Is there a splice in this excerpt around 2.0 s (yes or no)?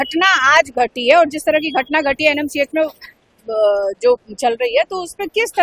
no